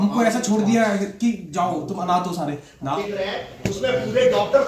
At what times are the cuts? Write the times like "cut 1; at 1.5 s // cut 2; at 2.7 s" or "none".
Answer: cut 1; at 3.0 s